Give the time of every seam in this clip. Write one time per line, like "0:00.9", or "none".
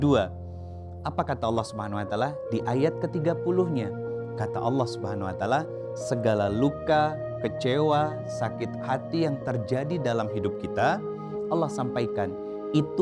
none